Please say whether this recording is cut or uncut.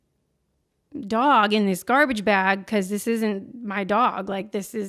uncut